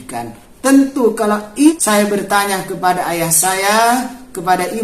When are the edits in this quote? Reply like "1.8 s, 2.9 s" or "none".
1.8 s